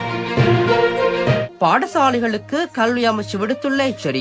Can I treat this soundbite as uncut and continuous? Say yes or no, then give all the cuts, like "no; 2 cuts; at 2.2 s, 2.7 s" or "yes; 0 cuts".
yes; 0 cuts